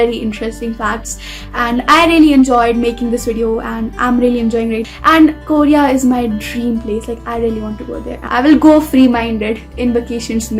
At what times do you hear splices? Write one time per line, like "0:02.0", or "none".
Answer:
0:04.8
0:08.2

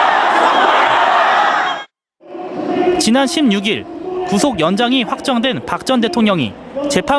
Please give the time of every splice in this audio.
0:01.6

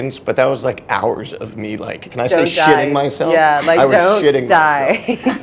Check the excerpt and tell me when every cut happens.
0:02.0

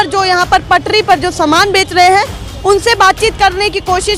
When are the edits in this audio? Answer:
none

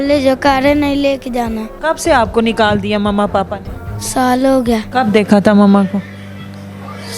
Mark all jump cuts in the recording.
0:01.7
0:04.9

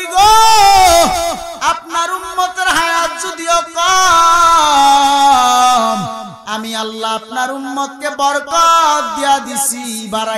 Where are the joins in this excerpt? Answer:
none

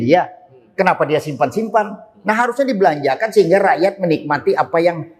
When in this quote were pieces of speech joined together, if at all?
none

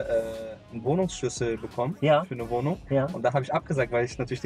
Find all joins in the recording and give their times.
none

